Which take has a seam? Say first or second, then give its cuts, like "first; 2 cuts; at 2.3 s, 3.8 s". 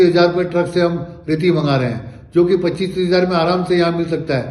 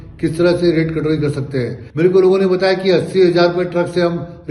second; 1 cut; at 1.8 s